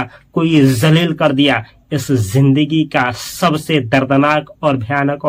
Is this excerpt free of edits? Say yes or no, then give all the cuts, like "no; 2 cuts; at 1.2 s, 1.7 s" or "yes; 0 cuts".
yes; 0 cuts